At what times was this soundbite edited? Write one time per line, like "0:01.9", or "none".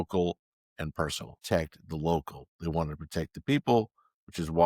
0:01.3

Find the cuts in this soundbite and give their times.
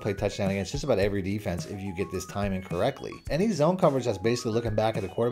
0:03.3

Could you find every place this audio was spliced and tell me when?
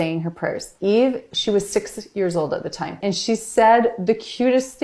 0:03.0

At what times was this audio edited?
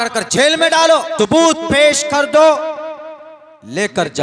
0:01.1

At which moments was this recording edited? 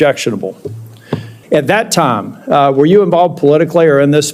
0:01.4

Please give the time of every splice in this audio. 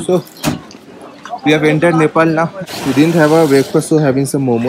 0:02.6

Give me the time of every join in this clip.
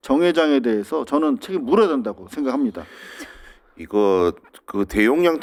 none

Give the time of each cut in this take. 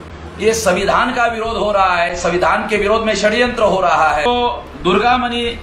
0:04.2

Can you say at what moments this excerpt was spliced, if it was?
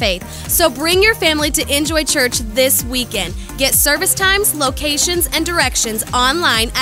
none

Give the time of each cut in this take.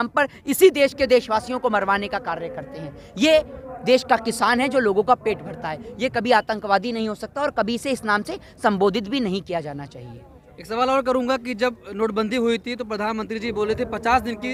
none

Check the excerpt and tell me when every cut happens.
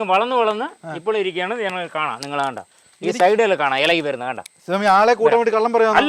none

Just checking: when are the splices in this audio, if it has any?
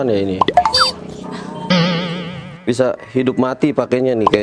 0:02.5

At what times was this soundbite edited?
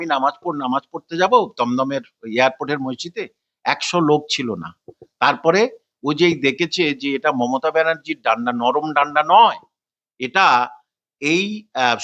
none

